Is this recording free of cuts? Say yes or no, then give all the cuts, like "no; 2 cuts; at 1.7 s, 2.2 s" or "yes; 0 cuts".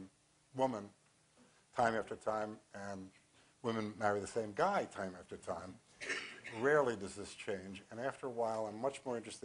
no; 1 cut; at 4.9 s